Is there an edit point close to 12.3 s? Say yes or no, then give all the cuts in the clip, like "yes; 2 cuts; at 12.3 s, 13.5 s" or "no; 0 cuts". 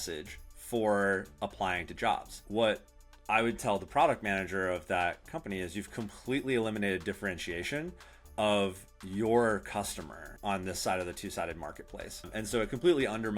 yes; 3 cuts; at 2.4 s, 10.3 s, 12.3 s